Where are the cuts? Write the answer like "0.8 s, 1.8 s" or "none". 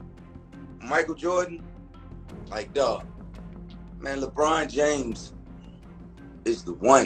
none